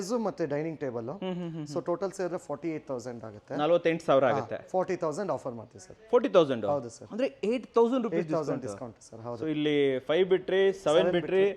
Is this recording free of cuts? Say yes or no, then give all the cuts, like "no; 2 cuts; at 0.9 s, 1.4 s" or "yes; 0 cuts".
yes; 0 cuts